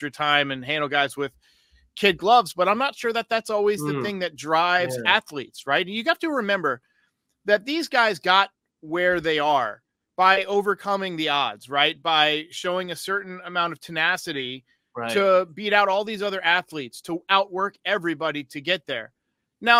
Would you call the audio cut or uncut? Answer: uncut